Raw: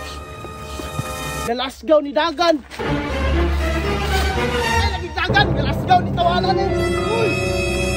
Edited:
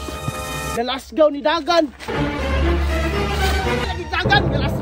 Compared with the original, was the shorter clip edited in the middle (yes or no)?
yes